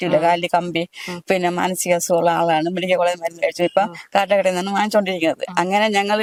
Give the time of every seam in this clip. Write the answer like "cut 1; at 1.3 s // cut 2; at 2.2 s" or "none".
none